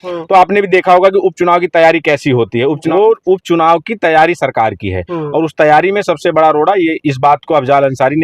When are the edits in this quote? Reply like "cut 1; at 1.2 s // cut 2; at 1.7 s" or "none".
cut 1; at 2.9 s

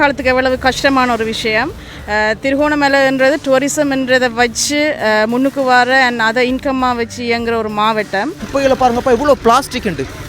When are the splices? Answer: cut 1; at 8.5 s

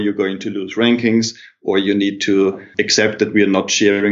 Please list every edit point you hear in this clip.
none

